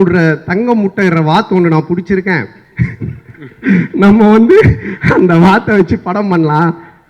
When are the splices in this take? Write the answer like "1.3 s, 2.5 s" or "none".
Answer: none

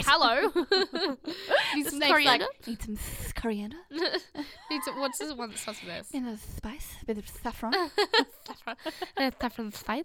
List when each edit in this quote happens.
none

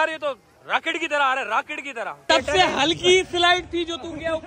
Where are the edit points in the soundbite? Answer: 2.2 s

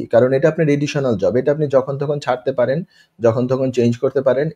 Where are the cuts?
none

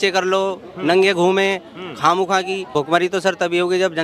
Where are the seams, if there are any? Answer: 2.7 s

